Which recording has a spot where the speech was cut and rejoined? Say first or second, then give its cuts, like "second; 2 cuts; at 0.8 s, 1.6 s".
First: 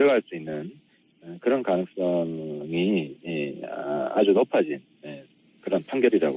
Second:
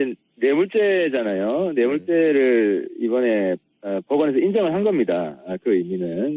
second; 1 cut; at 4.0 s